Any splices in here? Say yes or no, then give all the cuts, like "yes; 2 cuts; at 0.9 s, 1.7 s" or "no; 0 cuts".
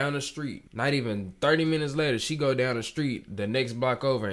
no; 0 cuts